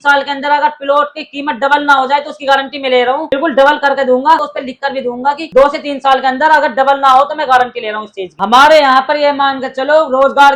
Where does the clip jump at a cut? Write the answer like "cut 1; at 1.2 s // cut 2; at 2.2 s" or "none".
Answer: none